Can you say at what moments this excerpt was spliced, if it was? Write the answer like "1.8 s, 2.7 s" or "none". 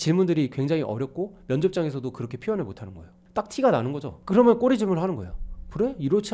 4.1 s